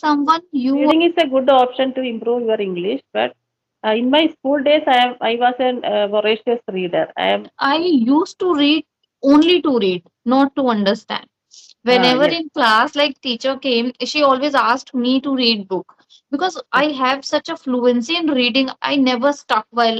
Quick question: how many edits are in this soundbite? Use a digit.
2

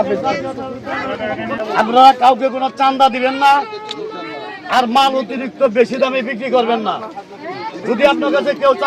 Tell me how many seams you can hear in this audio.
1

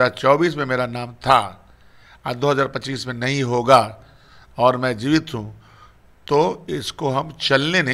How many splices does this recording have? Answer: 0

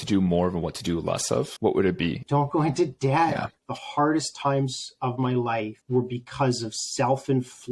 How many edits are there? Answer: 3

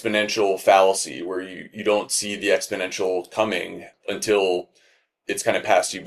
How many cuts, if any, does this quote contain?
0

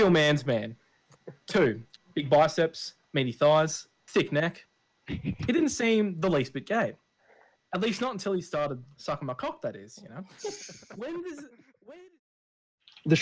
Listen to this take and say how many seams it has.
1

